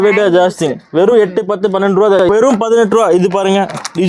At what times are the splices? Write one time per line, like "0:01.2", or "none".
0:02.2